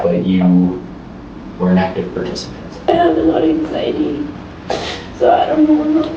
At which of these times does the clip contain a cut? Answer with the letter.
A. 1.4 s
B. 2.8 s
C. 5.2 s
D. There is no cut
B